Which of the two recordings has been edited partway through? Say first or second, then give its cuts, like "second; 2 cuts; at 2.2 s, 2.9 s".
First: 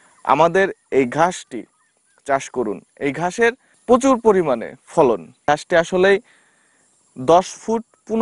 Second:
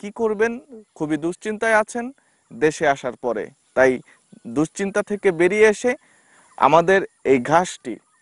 first; 2 cuts; at 3.7 s, 5.5 s